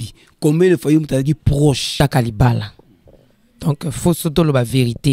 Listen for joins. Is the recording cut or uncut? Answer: cut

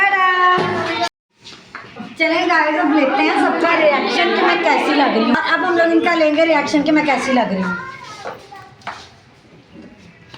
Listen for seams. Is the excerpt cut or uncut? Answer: cut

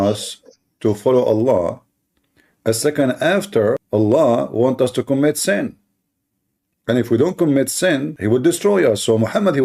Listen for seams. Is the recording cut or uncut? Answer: cut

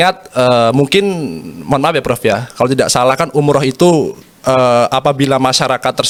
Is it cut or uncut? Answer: uncut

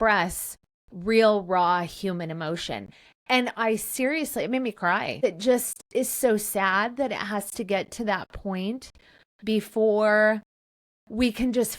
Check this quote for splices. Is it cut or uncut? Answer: cut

